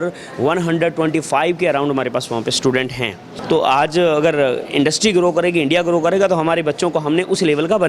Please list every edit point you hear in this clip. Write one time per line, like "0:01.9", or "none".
0:03.3